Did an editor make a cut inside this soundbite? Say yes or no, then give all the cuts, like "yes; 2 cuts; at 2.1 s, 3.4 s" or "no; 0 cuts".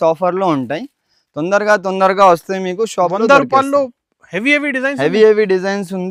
no; 0 cuts